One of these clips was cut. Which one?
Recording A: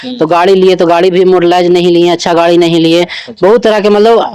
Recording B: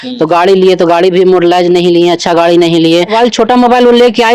B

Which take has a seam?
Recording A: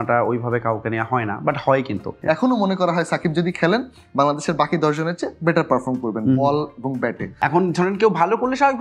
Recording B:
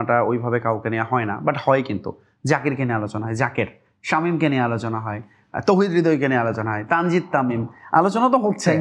A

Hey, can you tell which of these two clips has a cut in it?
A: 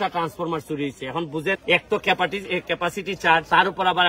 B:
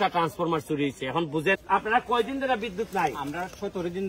B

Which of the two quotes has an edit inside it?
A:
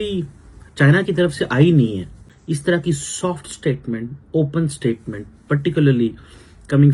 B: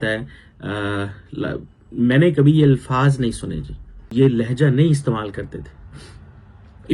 B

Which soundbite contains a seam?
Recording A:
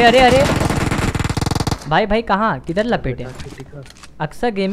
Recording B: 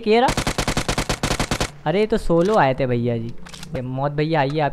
B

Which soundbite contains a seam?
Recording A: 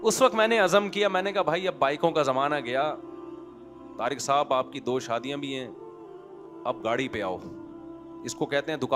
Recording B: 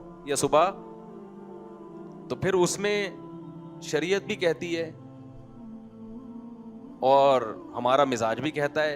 B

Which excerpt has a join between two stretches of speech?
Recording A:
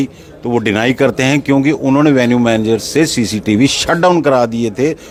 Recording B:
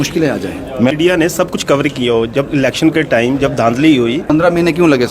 B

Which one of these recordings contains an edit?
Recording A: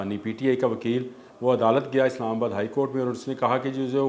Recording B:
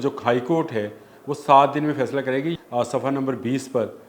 B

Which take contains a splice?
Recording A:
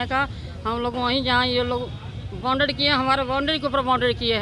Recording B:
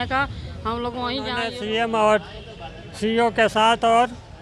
B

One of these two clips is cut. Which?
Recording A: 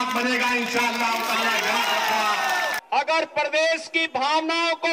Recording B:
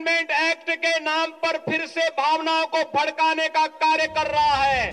A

